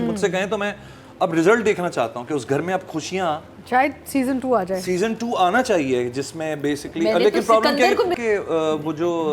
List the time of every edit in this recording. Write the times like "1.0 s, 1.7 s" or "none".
8.1 s